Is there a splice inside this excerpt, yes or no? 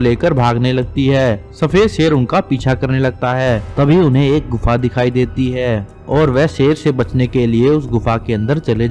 no